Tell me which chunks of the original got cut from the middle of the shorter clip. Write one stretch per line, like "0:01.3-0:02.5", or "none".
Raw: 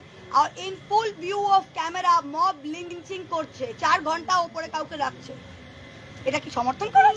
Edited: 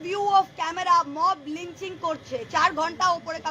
0:02.9-0:03.0